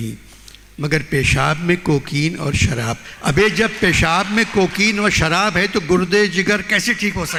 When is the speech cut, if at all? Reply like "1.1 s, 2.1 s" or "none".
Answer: none